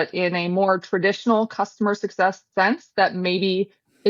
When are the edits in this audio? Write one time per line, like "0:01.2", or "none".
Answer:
none